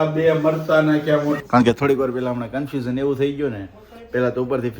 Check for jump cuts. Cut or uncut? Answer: cut